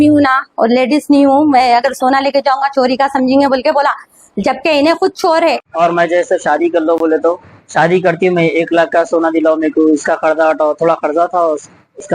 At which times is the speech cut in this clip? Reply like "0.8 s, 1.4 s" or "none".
5.7 s